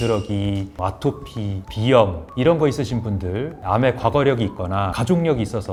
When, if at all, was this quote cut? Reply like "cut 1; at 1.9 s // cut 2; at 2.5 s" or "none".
none